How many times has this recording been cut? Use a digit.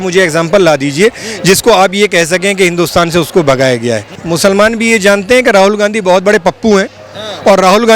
1